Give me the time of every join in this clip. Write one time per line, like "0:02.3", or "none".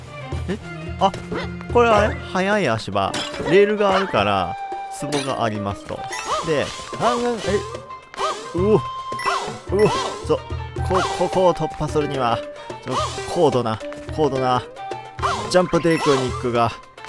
none